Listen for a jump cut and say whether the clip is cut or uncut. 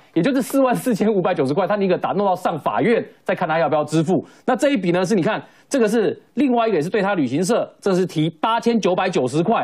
uncut